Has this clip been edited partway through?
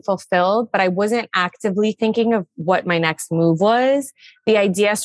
no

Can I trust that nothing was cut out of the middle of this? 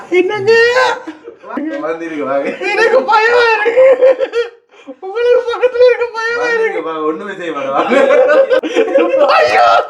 no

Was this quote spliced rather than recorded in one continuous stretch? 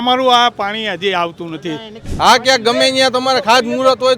yes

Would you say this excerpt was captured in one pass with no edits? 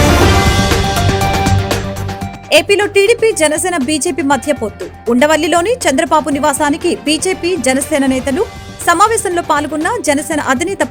yes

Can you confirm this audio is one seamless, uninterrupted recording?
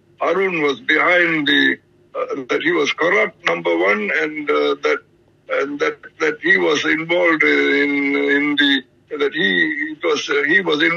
yes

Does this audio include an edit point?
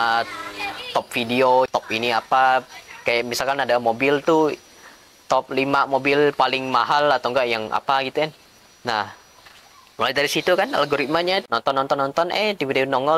no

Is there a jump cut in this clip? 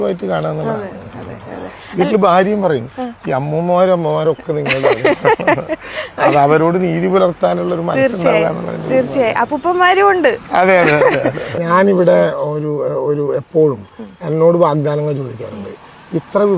yes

